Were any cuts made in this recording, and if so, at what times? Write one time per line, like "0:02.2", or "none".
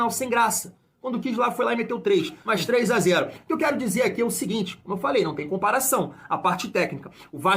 0:02.4

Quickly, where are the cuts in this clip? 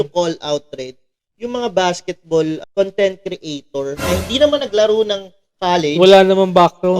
0:04.0

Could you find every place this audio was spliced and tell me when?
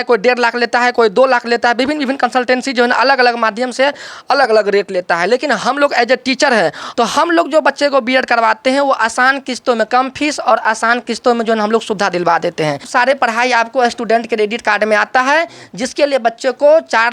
0:06.8
0:12.8

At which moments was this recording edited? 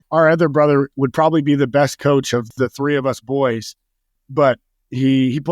0:00.9
0:02.5
0:04.1

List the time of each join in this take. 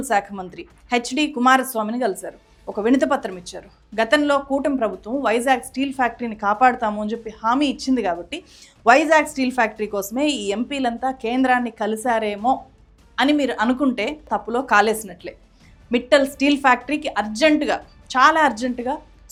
none

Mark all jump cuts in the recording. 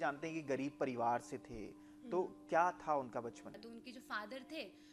0:03.6

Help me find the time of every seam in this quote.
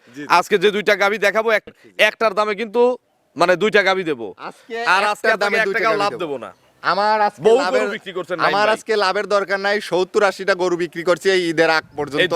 0:01.6

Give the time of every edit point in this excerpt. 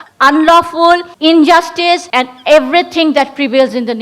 0:01.1
0:02.1

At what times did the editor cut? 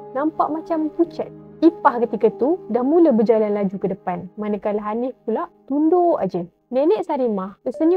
none

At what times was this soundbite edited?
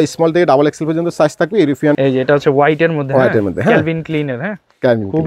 0:02.0

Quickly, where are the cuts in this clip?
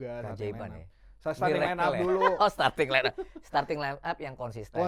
none

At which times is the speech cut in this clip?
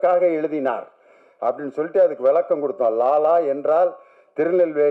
none

